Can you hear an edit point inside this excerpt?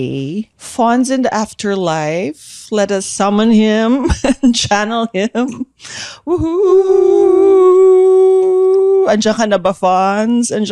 no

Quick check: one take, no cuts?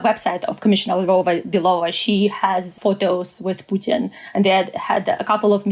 no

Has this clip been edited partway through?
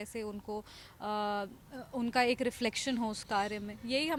no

